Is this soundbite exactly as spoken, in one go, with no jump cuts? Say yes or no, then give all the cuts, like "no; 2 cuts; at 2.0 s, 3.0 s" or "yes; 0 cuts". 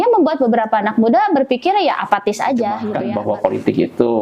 no; 1 cut; at 2.9 s